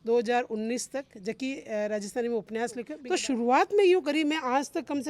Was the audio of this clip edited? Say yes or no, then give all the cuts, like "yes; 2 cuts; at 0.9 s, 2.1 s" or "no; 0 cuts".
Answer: yes; 1 cut; at 2.9 s